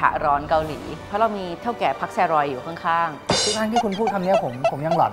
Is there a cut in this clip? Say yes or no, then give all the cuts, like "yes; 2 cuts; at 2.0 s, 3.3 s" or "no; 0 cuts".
no; 0 cuts